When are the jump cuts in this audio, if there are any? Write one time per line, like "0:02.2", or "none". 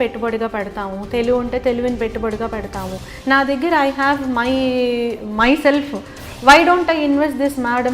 0:03.0